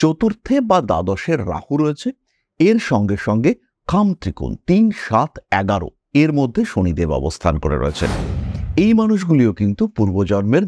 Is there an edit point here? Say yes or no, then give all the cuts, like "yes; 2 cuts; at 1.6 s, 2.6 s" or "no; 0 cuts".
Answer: no; 0 cuts